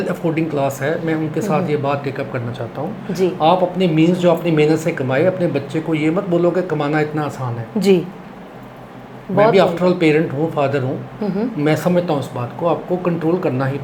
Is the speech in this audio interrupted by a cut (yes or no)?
no